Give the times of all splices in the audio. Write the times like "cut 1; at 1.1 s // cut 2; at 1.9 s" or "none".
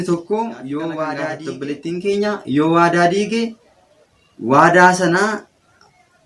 cut 1; at 1.4 s